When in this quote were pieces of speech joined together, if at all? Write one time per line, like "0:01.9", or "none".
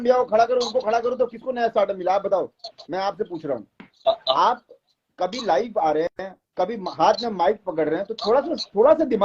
0:04.3

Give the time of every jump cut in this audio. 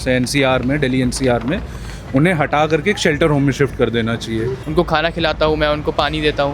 0:04.6

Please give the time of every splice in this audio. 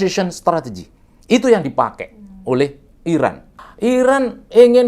0:03.5

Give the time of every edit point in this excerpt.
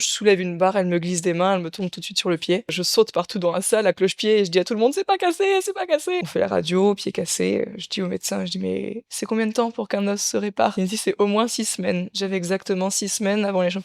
0:02.8
0:06.2
0:10.7
0:12.4

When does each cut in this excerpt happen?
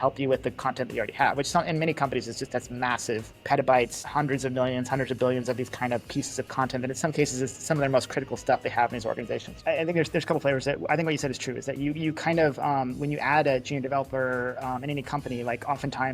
0:03.3
0:04.1
0:09.5

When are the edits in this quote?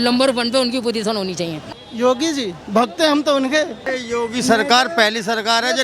0:01.7
0:03.9

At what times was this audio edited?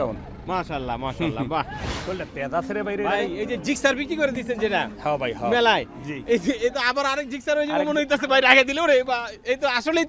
0:01.7

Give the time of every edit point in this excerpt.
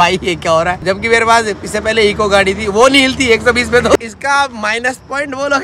0:00.8
0:04.0

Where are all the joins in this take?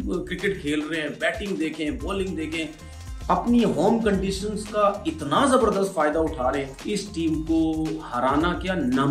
0:06.7

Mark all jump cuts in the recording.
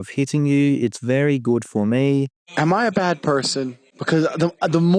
0:02.4

